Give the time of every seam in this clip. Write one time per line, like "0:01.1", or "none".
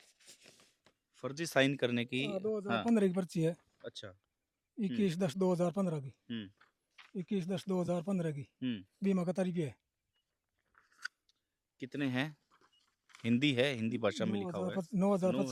none